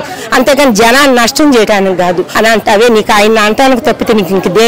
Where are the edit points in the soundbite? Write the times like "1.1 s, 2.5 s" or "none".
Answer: 2.3 s